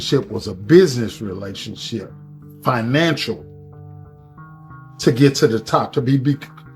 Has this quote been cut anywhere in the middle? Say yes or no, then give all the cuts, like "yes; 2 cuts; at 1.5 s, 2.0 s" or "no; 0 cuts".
no; 0 cuts